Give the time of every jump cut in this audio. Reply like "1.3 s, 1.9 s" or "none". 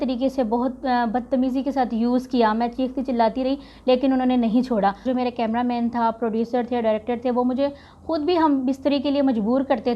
5.1 s

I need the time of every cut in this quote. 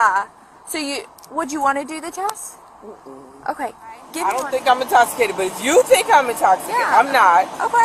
4.1 s

